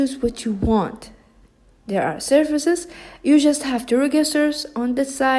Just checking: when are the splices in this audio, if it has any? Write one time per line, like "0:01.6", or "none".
none